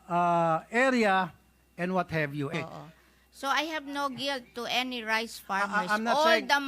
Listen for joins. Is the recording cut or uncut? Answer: cut